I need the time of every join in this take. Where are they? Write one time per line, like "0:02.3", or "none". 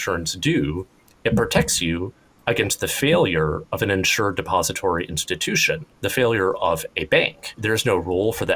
0:07.6